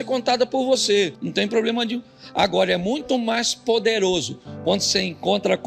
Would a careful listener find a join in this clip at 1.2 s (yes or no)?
yes